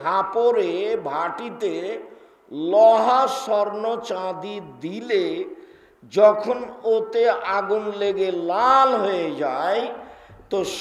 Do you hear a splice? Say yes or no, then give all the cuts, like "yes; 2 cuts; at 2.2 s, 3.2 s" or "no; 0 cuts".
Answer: no; 0 cuts